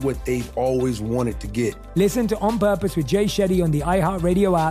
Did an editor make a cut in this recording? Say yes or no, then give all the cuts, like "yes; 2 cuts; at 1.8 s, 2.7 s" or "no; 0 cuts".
yes; 1 cut; at 1.8 s